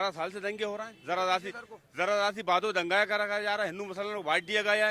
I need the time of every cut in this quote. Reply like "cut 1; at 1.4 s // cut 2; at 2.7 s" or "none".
none

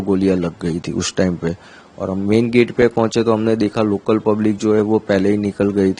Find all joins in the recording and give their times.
none

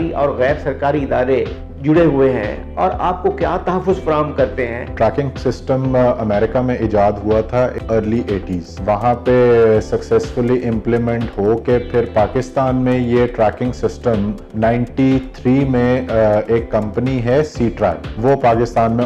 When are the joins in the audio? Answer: cut 1; at 4.9 s // cut 2; at 7.8 s // cut 3; at 8.7 s // cut 4; at 14.4 s // cut 5; at 18.1 s

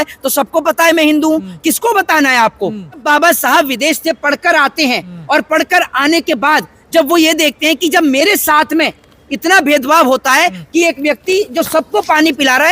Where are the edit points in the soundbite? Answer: cut 1; at 3.0 s

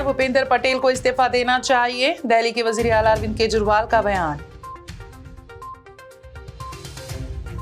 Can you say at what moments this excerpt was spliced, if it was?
none

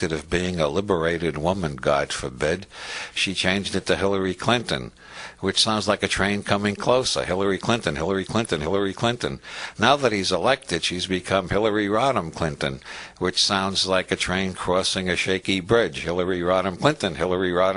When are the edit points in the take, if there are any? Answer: cut 1; at 5.7 s

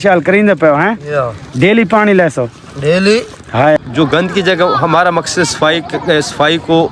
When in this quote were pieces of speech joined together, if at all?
cut 1; at 3.8 s

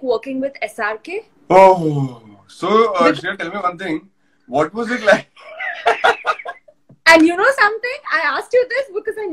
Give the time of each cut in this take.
cut 1; at 1.3 s

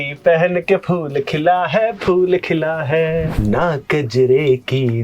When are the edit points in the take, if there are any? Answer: cut 1; at 3.3 s

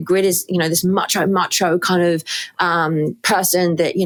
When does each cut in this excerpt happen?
none

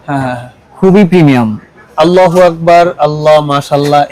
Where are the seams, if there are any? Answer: cut 1; at 1.8 s

